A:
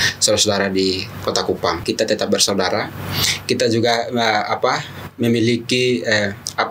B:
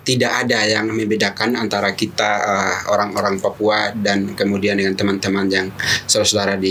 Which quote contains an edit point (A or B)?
A